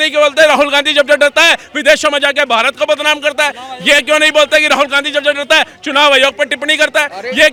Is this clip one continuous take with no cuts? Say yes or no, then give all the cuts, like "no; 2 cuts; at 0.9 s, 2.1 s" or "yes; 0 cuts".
yes; 0 cuts